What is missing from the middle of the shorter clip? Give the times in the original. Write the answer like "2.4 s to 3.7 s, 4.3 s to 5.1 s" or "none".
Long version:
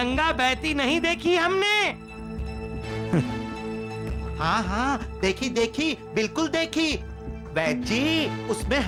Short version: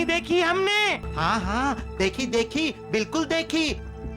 2.0 s to 4.3 s